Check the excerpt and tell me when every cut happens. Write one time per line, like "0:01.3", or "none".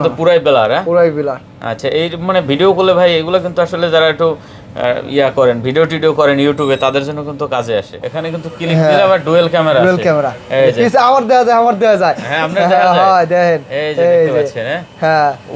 0:08.0